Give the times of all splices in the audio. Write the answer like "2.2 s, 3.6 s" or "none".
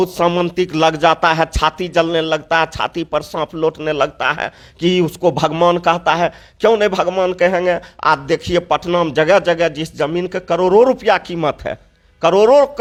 none

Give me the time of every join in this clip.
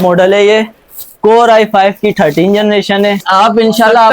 3.2 s

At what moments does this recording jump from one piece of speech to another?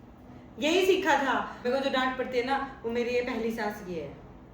1.5 s

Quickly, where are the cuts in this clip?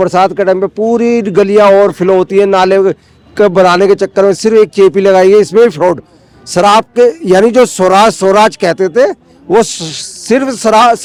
none

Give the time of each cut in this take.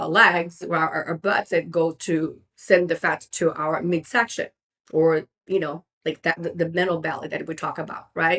none

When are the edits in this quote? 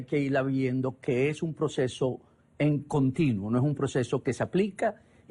4.1 s

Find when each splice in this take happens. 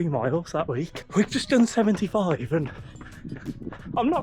1.0 s

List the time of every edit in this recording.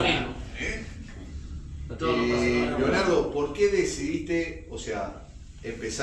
none

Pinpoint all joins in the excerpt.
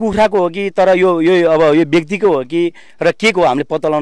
none

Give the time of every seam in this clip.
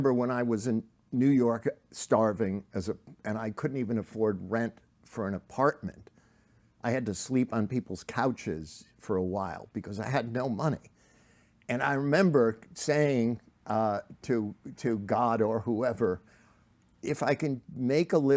1.0 s, 16.9 s

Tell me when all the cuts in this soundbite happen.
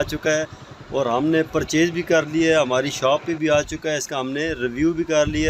none

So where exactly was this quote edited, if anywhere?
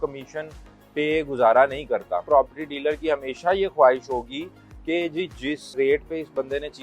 2.2 s

